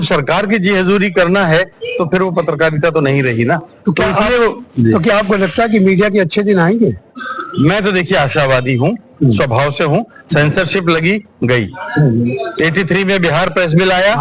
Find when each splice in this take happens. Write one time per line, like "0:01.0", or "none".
none

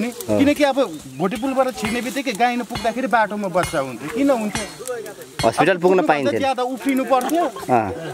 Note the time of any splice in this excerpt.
none

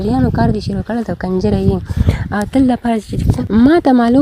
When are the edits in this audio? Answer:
0:03.3

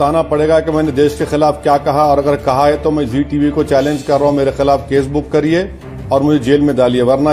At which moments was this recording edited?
none

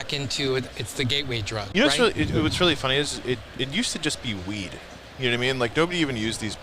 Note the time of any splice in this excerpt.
0:01.7

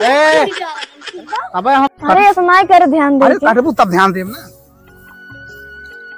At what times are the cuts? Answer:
0:01.9

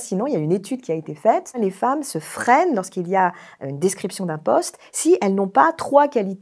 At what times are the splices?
0:01.6

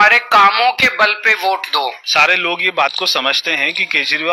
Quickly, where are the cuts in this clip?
0:01.7

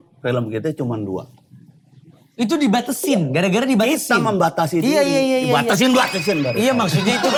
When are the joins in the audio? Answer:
none

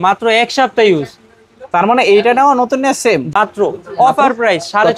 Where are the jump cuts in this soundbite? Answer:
0:03.3

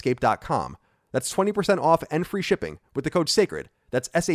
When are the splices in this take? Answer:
none

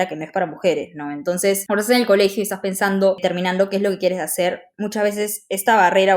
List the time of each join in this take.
0:01.6
0:03.2

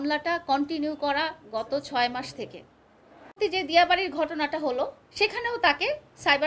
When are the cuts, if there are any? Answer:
0:03.3

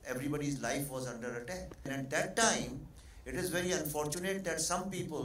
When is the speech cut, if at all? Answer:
0:01.9

